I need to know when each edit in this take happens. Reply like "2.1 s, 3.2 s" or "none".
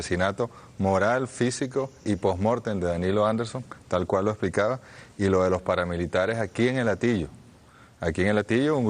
7.1 s